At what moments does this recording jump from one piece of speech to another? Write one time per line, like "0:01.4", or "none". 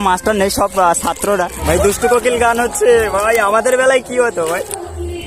0:01.6

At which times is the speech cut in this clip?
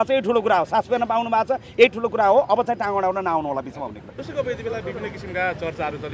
none

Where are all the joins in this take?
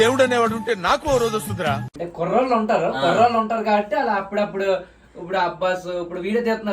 0:01.8

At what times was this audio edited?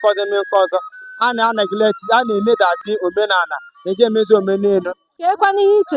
0:05.0

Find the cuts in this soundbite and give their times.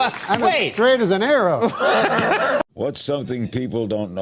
none

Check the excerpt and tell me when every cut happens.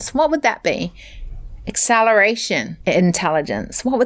0:02.7

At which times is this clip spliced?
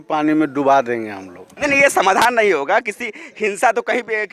none

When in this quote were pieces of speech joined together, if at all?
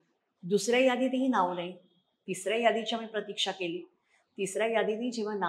none

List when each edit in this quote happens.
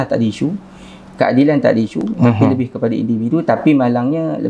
none

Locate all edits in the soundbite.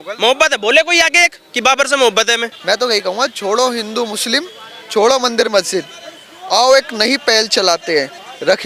0:02.5

